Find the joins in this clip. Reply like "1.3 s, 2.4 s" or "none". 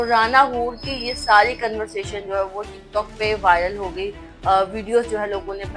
none